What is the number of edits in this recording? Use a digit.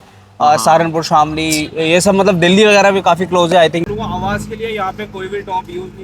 1